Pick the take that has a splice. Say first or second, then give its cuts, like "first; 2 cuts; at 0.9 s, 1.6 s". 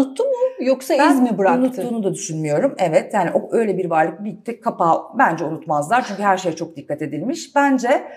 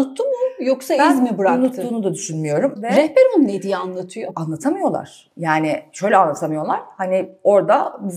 second; 2 cuts; at 2.8 s, 4.3 s